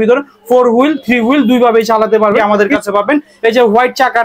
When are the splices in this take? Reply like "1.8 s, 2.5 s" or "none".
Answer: 2.4 s